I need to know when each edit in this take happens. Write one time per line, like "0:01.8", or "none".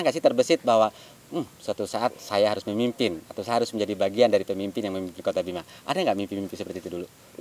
none